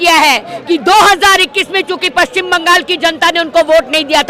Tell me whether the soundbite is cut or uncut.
uncut